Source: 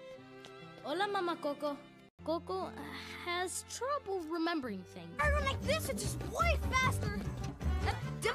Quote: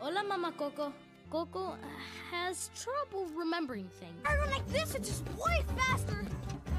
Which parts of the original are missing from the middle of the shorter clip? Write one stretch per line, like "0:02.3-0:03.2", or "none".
0:02.0-0:02.1

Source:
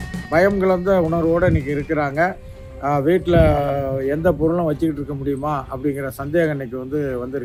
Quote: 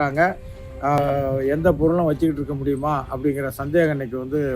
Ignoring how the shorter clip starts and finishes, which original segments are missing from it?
0:03.0-0:03.6

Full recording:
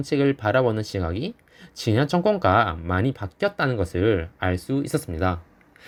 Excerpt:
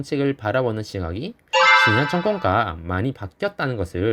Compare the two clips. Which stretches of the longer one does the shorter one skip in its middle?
none

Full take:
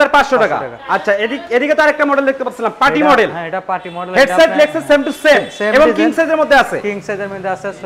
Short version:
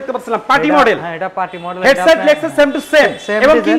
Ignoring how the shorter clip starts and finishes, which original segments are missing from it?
none

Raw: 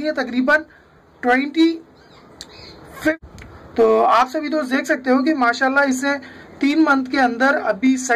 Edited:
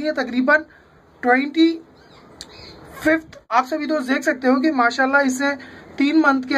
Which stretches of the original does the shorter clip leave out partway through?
0:03.5-0:04.2

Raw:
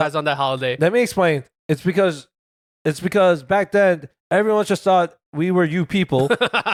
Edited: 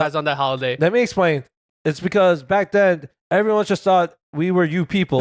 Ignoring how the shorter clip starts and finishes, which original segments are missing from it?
0:01.5-0:02.5

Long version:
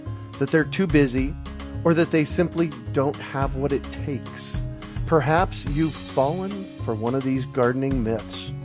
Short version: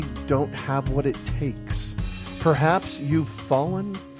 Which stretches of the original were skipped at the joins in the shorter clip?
none

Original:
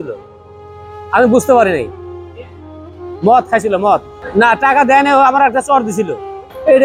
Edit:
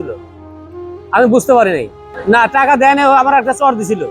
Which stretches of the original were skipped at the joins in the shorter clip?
0:02.1-0:04.2

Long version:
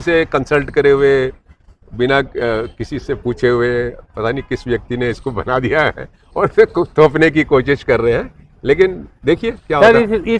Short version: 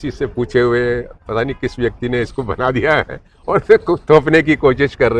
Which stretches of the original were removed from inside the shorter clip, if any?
none

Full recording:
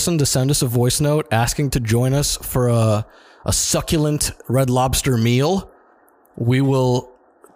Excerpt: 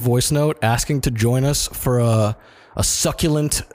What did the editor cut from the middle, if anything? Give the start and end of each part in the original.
none

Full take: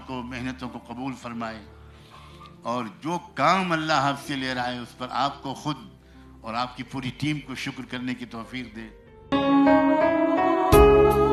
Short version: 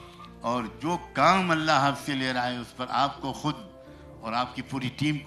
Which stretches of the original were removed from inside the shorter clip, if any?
none

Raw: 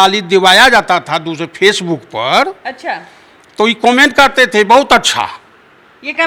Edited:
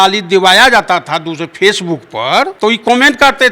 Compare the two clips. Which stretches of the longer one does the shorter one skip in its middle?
0:02.5-0:03.5

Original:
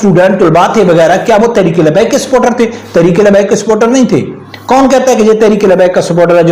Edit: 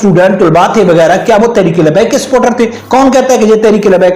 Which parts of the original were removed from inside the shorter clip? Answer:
0:02.8-0:04.6

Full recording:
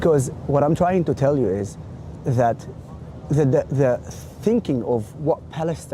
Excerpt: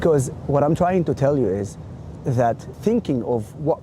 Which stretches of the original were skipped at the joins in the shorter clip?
0:02.7-0:04.3

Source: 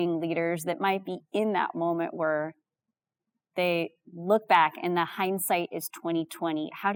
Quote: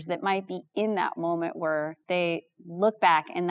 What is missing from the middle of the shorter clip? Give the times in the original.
0:02.5-0:03.4

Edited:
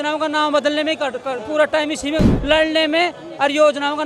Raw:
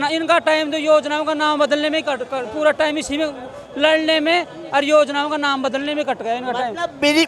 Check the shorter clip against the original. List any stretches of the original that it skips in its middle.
0:03.4-0:03.7

